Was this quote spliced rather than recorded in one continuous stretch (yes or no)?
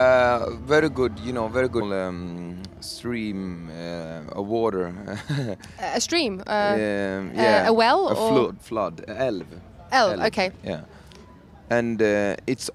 no